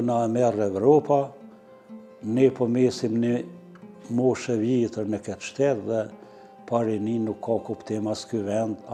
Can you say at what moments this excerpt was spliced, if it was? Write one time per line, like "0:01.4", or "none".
none